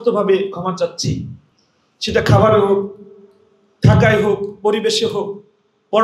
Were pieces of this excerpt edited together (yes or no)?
no